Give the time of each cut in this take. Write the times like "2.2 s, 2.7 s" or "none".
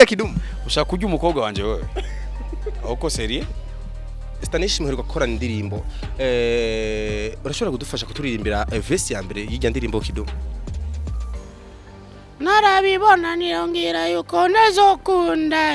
4.4 s